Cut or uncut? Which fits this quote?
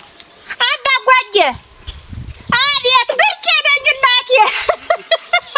uncut